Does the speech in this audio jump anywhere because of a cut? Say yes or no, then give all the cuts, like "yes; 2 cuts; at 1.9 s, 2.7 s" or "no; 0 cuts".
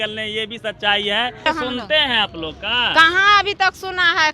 yes; 1 cut; at 1.5 s